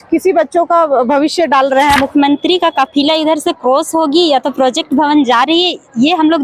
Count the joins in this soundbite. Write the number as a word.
one